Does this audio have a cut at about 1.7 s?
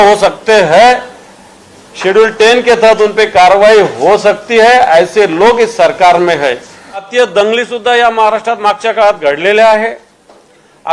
no; 1 cut; at 7.1 s

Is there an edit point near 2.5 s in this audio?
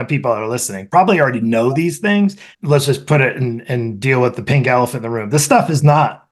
yes; 1 cut; at 2.5 s

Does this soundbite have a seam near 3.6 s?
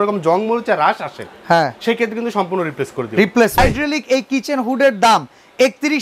yes; 1 cut; at 3.6 s

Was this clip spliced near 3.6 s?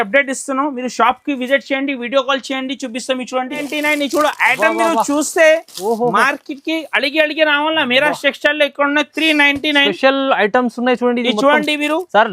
yes; 1 cut; at 3.6 s

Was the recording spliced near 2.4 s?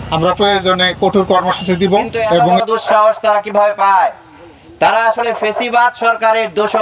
yes; 1 cut; at 2.4 s

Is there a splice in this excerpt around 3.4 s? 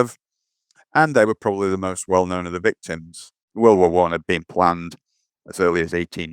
yes; 1 cut; at 3.4 s

